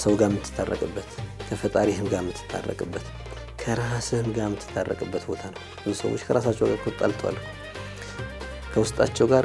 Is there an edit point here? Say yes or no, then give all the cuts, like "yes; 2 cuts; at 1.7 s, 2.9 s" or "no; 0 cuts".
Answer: no; 0 cuts